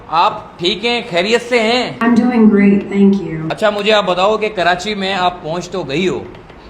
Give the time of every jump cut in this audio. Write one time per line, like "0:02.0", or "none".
0:01.9
0:03.4

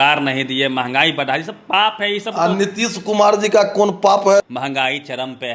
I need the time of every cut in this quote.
0:04.4

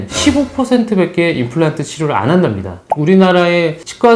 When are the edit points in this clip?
0:02.9

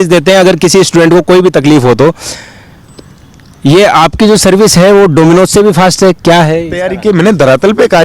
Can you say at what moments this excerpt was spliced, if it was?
0:06.9

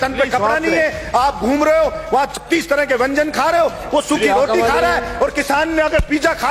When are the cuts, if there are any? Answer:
none

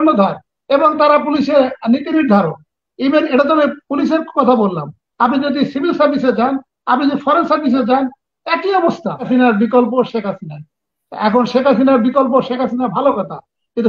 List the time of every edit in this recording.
0:09.3

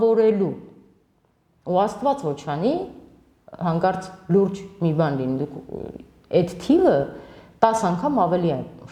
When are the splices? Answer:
none

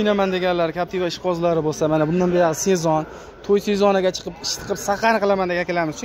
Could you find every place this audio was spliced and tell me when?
none

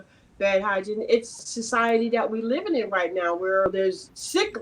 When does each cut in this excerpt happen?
0:01.5
0:03.7

